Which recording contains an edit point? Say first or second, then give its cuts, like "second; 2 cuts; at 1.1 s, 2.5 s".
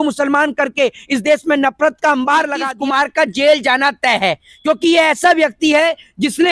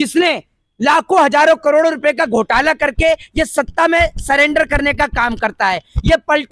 first; 1 cut; at 2.7 s